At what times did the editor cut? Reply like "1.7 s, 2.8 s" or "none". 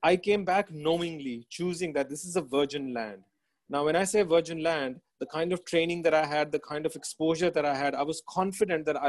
none